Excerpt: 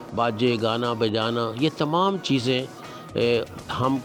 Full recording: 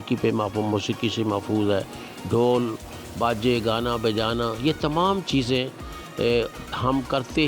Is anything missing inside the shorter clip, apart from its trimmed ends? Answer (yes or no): no